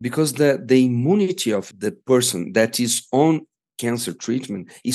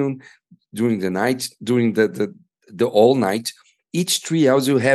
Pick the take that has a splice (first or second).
first